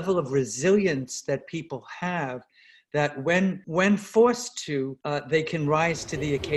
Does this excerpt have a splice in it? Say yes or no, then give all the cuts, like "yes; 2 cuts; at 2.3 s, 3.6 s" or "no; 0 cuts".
yes; 2 cuts; at 3.6 s, 5.0 s